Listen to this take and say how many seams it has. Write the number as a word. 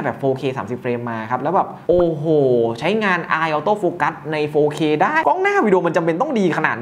one